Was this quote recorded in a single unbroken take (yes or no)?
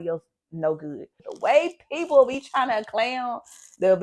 no